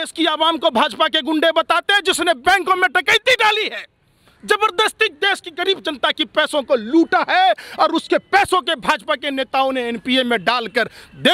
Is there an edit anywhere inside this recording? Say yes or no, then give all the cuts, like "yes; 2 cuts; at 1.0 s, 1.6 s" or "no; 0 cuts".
no; 0 cuts